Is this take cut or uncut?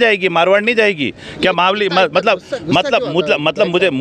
uncut